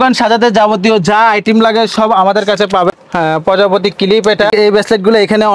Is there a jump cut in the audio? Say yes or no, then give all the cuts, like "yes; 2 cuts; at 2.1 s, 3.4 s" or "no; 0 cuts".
yes; 2 cuts; at 2.9 s, 4.5 s